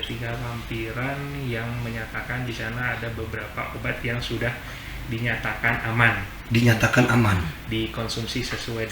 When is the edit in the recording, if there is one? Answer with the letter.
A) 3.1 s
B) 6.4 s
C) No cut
C